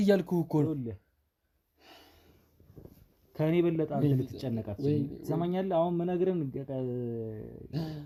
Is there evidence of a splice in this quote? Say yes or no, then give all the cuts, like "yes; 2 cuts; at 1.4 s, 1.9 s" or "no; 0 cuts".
no; 0 cuts